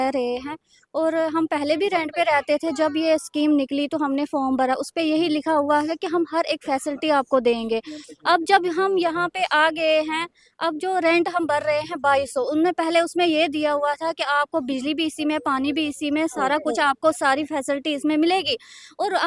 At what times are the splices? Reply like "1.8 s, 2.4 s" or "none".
none

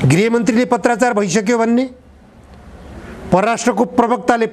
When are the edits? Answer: none

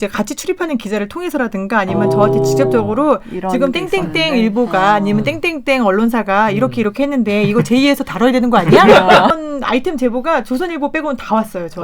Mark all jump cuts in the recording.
9.3 s

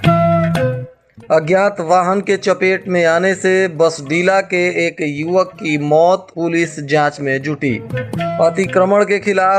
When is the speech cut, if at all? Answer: 1.1 s

